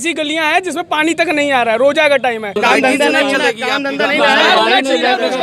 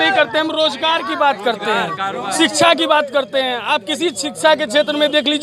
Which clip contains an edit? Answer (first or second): first